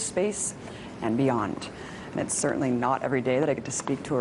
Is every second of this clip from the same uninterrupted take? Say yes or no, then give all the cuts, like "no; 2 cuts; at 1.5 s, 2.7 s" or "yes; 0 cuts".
no; 1 cut; at 2.5 s